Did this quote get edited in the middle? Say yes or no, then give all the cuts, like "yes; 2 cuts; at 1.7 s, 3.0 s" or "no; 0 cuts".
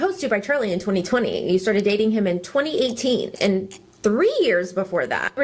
no; 0 cuts